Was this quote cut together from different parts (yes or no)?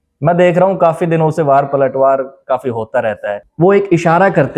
yes